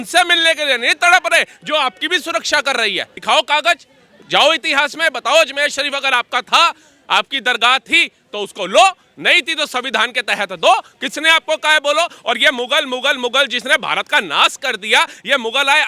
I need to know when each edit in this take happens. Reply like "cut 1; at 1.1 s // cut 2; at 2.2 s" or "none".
cut 1; at 3.1 s